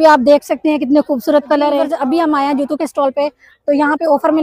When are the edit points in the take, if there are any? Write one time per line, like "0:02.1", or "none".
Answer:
0:01.9